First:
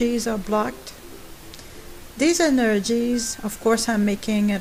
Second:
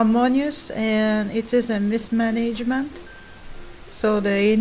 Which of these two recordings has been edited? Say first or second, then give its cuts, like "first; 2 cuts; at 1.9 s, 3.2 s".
second; 1 cut; at 2.0 s